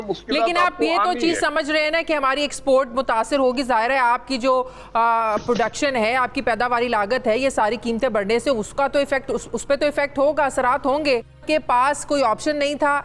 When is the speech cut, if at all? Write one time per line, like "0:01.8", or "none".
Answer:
0:11.4